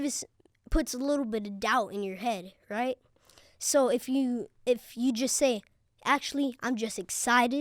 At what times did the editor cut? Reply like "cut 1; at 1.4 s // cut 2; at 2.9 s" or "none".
none

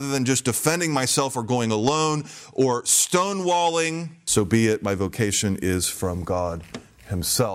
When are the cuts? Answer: cut 1; at 4.1 s

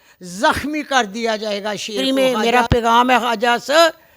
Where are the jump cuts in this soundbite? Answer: cut 1; at 2.3 s

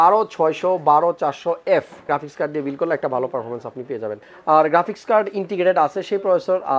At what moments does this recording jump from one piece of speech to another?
cut 1; at 2.1 s // cut 2; at 4.3 s

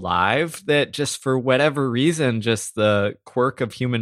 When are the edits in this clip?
none

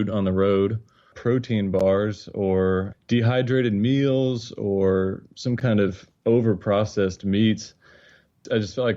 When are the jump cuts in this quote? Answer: cut 1; at 1.1 s // cut 2; at 6.1 s

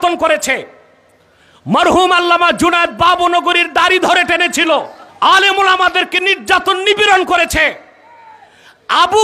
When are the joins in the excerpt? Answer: cut 1; at 5.0 s

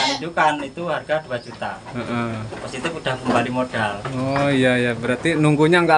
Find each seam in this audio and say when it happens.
none

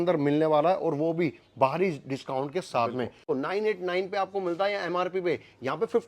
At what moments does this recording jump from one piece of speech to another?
cut 1; at 3.3 s

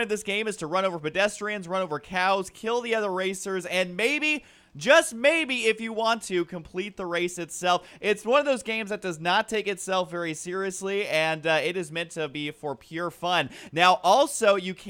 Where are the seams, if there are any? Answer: cut 1; at 13.6 s

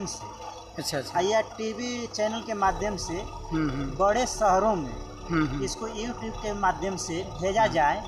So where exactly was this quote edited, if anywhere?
none

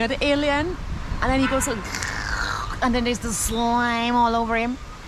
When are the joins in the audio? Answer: none

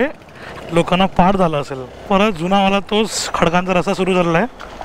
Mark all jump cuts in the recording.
cut 1; at 2.0 s

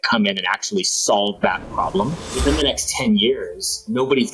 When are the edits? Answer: cut 1; at 2.3 s

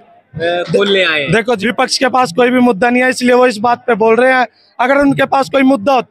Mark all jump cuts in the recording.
cut 1; at 1.6 s

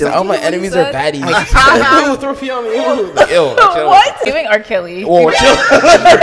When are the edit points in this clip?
cut 1; at 4.2 s

